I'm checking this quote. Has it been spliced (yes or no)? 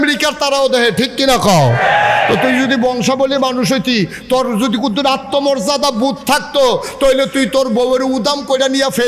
no